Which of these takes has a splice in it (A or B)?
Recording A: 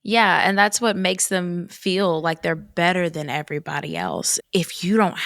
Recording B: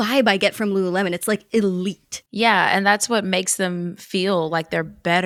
A